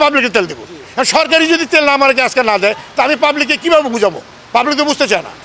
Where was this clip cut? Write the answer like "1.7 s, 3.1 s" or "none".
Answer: none